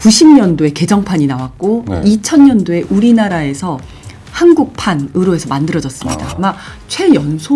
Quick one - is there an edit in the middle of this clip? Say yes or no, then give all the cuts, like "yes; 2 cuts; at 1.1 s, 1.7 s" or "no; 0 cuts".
yes; 1 cut; at 6.3 s